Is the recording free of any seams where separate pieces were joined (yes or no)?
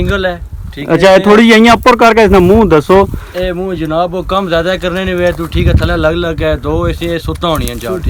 yes